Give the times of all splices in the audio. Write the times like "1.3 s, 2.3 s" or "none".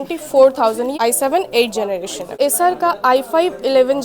0.9 s, 2.4 s